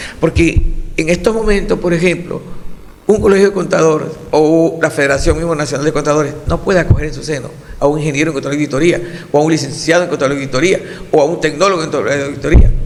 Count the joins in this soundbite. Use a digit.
0